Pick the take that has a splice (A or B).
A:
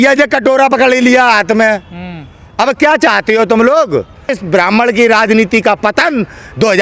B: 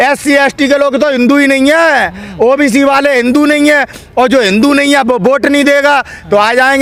A